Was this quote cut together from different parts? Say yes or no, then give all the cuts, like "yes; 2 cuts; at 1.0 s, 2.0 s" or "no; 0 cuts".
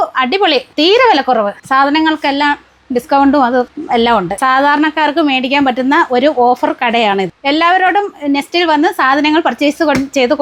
no; 0 cuts